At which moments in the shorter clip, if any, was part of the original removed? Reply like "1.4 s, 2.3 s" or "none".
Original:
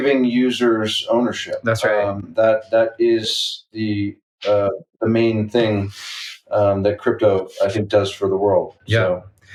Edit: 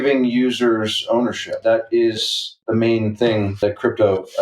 1.6 s, 2.5 s, 3.6 s